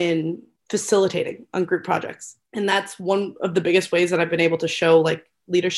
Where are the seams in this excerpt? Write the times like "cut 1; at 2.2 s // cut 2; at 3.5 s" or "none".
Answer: none